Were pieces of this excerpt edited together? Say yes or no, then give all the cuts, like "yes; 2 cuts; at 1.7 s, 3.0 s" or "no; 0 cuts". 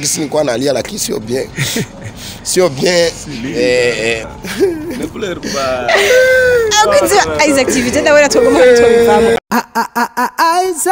yes; 2 cuts; at 4.4 s, 9.4 s